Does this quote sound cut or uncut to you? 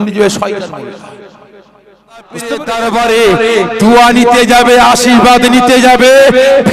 cut